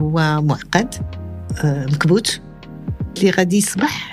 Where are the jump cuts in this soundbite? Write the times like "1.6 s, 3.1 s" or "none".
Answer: none